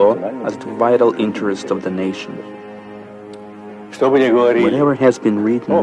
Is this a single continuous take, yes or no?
no